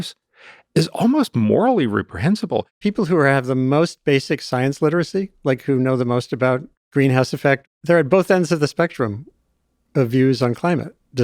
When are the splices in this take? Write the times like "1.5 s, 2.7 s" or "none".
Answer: 2.8 s, 6.8 s, 7.6 s